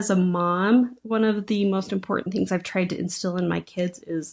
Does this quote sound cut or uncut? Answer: uncut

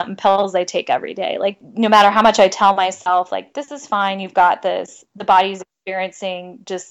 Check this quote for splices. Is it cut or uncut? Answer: cut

